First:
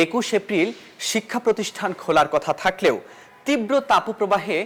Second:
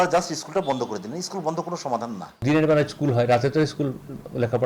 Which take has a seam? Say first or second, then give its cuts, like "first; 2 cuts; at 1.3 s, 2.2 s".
second; 1 cut; at 2.4 s